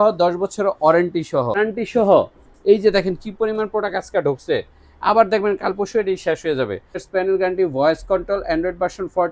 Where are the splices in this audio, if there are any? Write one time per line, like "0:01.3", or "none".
0:01.6
0:07.0